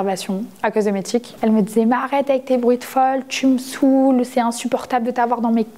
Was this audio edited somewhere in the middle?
yes; 1 cut; at 1.3 s

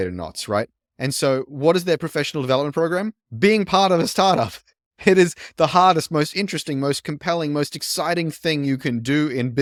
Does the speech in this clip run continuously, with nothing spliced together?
yes; 0 cuts

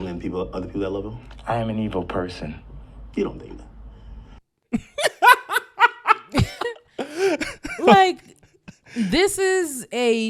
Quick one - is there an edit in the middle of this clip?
no; 0 cuts

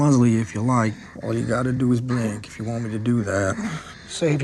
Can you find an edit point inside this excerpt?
no; 0 cuts

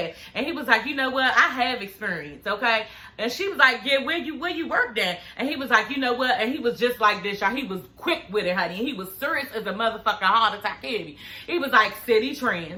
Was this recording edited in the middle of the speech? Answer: no; 0 cuts

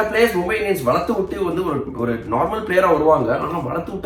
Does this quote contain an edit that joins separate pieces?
no; 0 cuts

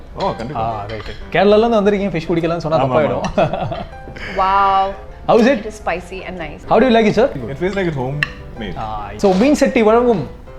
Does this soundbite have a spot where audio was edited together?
yes; 4 cuts; at 5.1 s, 6.5 s, 7.4 s, 9.1 s

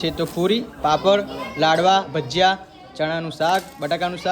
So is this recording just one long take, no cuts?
yes; 0 cuts

